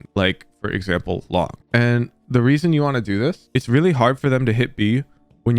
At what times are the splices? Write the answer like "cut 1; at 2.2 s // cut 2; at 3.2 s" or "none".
cut 1; at 3.5 s